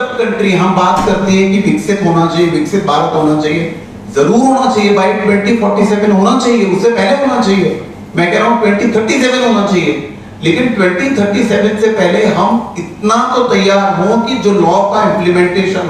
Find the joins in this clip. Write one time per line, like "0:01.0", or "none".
none